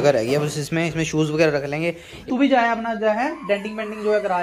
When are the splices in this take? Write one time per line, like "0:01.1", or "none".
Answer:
0:02.3